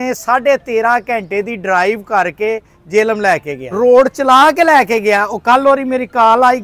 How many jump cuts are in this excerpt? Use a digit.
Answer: 1